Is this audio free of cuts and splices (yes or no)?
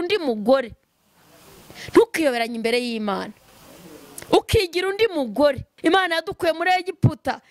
no